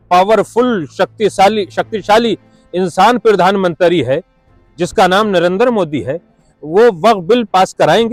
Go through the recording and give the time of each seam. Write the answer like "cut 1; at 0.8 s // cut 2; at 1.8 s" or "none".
none